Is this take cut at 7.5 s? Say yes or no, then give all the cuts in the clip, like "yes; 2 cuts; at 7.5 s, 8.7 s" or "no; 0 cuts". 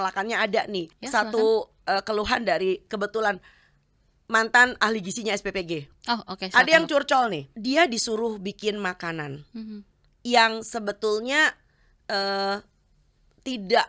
yes; 2 cuts; at 0.9 s, 7.5 s